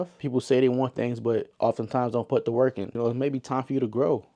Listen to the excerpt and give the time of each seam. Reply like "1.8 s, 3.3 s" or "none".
2.9 s